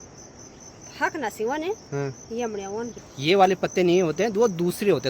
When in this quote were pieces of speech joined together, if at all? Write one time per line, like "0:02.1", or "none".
0:03.0